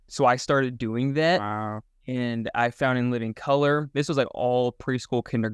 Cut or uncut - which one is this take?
uncut